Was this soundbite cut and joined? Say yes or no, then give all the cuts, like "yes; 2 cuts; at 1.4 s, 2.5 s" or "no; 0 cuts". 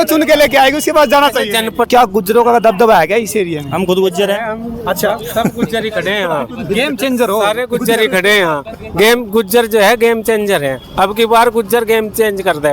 yes; 1 cut; at 1.9 s